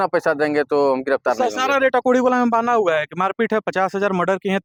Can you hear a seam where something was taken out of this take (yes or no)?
no